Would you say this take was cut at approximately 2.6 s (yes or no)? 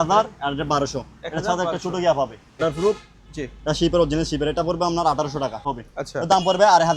yes